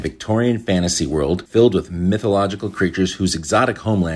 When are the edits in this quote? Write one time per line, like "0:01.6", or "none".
0:01.4